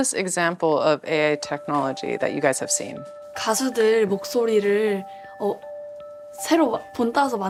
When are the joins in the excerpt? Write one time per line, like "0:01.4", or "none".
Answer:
none